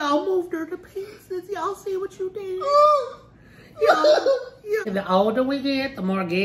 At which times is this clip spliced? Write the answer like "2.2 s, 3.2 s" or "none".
4.9 s